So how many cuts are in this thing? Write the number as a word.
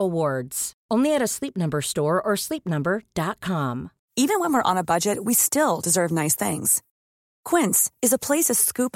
one